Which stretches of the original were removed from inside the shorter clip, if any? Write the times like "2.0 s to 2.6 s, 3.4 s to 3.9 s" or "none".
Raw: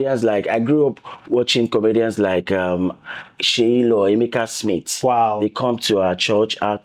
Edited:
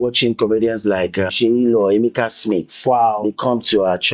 2.6 s to 3.5 s